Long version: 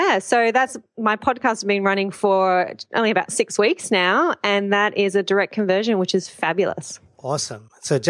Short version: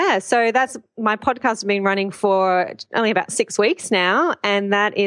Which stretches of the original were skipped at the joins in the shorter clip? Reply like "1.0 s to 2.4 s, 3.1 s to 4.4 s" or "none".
none